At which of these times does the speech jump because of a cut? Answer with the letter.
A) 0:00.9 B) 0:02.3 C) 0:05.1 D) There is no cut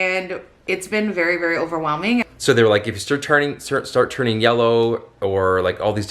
B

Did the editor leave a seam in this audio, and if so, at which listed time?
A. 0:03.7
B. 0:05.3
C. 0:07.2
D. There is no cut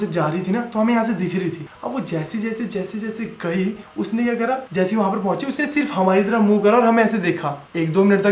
D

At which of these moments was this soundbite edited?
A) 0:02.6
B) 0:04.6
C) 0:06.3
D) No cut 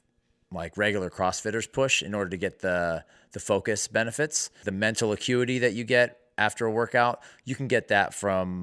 B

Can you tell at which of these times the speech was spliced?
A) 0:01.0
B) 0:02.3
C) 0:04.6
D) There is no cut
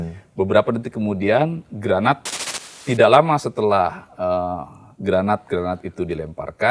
B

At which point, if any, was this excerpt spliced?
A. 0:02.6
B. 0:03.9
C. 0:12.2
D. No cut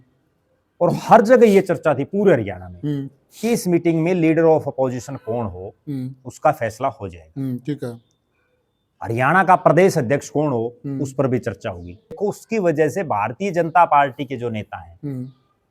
C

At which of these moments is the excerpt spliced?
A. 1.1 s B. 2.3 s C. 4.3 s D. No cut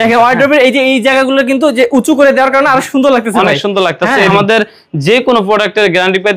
C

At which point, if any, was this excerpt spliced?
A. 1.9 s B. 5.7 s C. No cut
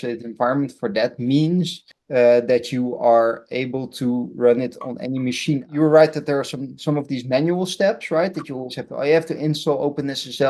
B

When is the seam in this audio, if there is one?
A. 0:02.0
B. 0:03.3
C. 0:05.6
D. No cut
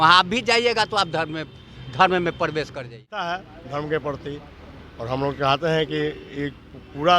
B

